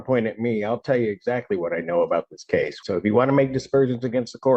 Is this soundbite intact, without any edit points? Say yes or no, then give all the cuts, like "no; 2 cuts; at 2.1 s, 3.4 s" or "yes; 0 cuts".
no; 1 cut; at 2.8 s